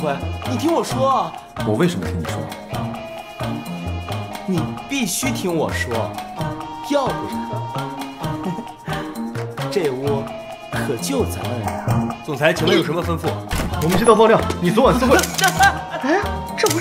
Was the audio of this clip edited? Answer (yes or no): no